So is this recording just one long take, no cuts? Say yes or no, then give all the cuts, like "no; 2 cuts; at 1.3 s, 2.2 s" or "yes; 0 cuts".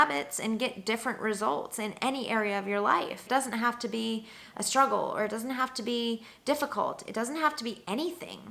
no; 1 cut; at 3.2 s